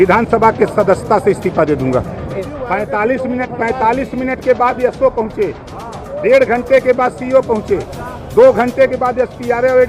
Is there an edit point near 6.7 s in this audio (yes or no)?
no